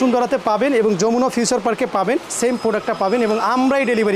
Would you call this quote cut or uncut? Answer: uncut